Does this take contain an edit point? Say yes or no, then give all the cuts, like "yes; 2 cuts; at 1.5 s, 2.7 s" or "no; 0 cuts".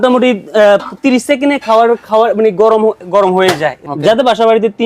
yes; 1 cut; at 3.8 s